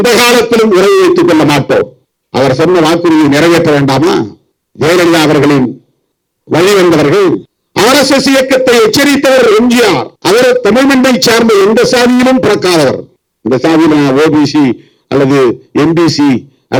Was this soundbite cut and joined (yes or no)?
no